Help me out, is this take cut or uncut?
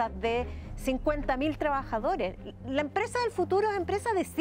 uncut